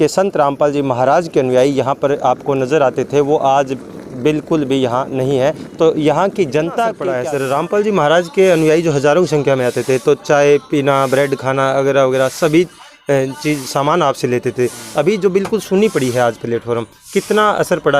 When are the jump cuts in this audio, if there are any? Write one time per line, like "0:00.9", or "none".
0:07.2